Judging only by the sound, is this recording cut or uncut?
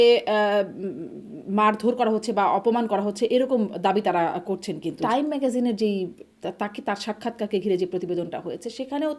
cut